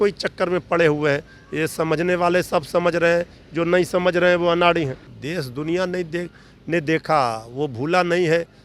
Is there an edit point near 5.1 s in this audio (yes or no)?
yes